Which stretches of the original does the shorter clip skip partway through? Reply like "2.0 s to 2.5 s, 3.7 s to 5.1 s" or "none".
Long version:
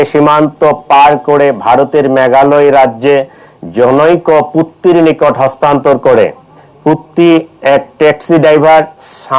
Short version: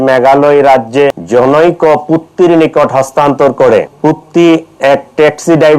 3.3 s to 3.7 s, 6.4 s to 6.7 s